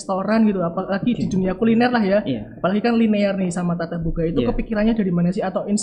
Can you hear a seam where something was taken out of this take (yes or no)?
no